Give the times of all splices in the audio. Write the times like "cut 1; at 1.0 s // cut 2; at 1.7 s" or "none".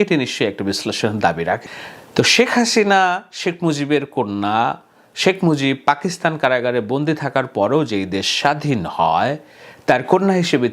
cut 1; at 1.6 s